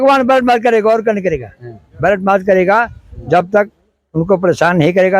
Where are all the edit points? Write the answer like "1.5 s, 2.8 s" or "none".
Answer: none